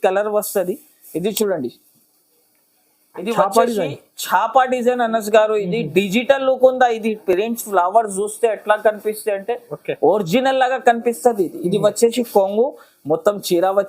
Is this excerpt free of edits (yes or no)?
yes